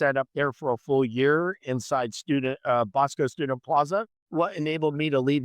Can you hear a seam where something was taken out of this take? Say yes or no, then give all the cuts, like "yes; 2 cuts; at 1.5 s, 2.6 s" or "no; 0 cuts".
yes; 1 cut; at 4.2 s